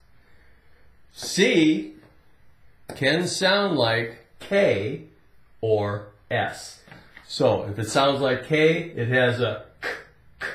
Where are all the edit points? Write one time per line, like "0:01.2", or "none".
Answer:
0:08.1